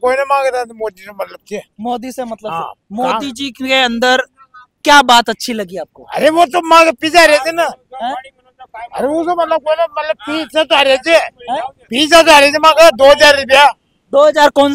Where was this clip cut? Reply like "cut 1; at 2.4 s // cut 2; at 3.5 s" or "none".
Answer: none